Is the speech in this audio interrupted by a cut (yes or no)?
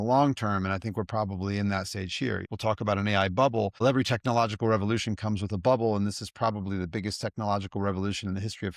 yes